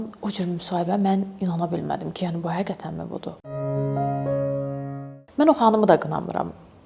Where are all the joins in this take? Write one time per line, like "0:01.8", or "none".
none